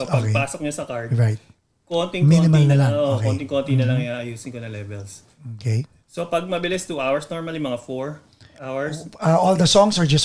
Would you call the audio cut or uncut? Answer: uncut